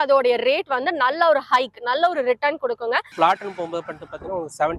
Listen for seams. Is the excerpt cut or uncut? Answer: cut